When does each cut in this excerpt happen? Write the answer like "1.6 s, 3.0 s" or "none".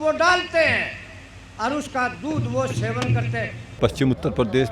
3.6 s